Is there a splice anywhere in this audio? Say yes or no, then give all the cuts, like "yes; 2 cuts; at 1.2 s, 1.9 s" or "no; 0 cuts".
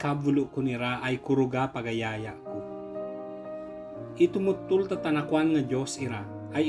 yes; 2 cuts; at 2.4 s, 4.1 s